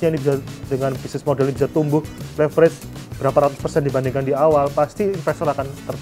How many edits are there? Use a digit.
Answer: 0